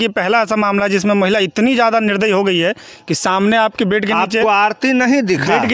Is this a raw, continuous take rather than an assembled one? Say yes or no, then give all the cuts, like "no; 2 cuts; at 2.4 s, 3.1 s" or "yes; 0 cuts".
yes; 0 cuts